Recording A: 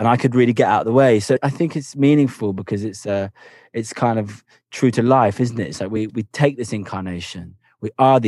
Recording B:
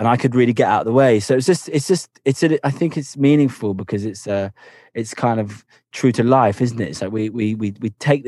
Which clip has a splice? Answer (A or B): A